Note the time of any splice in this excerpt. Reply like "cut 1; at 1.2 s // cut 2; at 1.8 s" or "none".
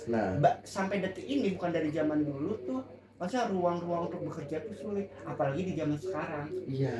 none

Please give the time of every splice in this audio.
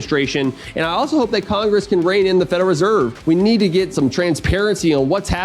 cut 1; at 3.2 s // cut 2; at 3.9 s

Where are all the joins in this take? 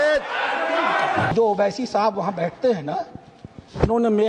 cut 1; at 1.3 s

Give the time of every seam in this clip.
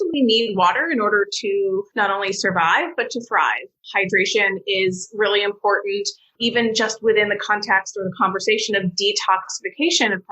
cut 1; at 1.9 s

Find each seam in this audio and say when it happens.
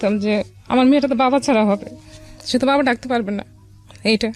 none

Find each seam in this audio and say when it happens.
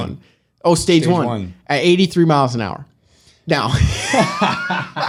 none

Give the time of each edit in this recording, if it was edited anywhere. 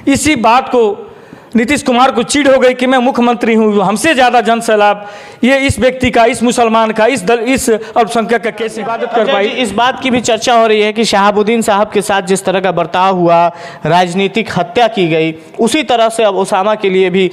cut 1; at 8.8 s

